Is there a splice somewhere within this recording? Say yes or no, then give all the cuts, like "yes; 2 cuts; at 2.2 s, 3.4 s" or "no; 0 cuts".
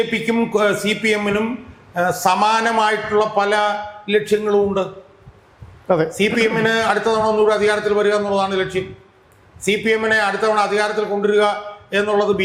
no; 0 cuts